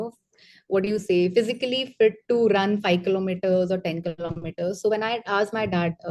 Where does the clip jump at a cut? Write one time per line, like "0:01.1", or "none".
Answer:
none